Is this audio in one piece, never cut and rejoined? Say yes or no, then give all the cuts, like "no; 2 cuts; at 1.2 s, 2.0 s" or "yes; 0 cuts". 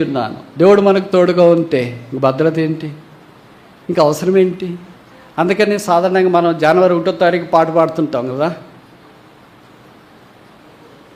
yes; 0 cuts